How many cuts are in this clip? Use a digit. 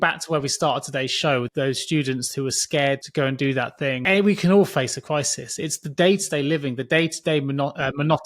3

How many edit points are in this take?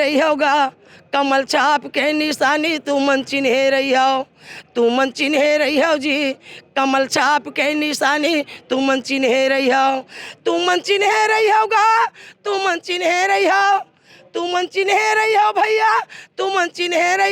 0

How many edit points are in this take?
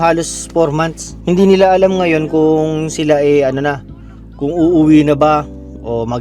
1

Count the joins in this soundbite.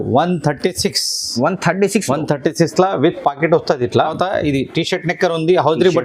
1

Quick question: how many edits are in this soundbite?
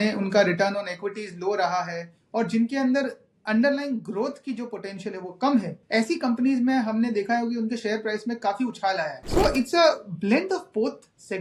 2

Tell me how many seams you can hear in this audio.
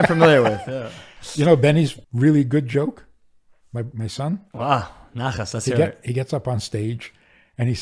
1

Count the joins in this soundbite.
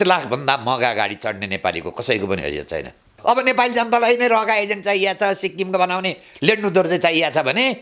1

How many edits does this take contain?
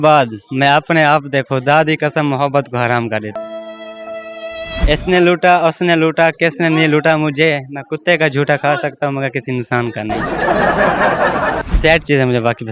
2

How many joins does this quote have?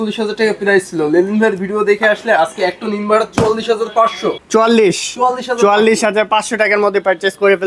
0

